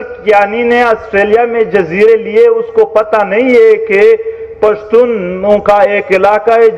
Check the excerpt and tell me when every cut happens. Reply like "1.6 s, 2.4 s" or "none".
none